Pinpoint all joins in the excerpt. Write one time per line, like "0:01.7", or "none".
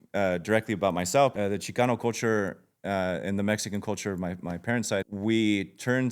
0:01.3
0:05.1